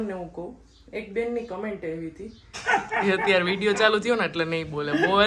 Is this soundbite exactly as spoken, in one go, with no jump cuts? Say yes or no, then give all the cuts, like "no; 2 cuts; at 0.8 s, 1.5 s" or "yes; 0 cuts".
no; 1 cut; at 2.5 s